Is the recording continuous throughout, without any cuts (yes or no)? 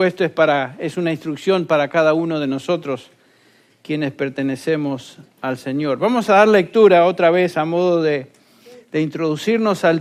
yes